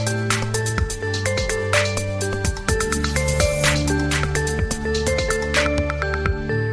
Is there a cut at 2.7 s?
no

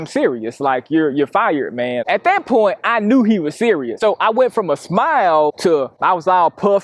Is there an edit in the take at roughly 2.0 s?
yes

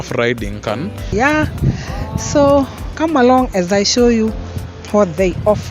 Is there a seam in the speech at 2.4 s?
no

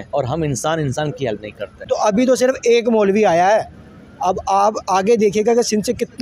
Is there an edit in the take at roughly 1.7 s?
yes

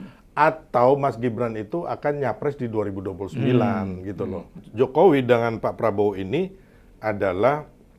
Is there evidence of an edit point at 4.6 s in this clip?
yes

